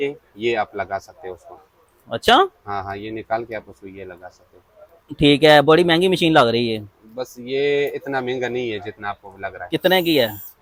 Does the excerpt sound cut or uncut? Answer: uncut